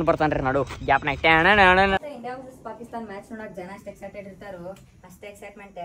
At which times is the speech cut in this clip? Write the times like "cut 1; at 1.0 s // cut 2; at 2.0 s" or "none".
cut 1; at 2.0 s